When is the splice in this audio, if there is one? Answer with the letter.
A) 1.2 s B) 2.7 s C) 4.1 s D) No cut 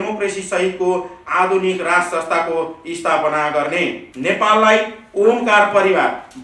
C